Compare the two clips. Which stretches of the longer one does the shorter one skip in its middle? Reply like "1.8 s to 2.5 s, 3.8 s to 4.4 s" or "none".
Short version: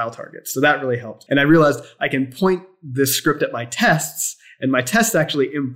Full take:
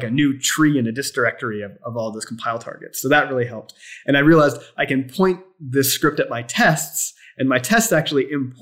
3.6 s to 3.9 s